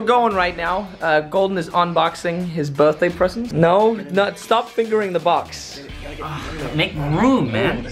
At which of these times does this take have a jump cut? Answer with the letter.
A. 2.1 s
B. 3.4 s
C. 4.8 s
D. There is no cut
B